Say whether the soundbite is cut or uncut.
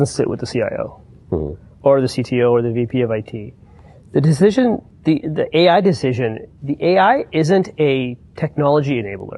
uncut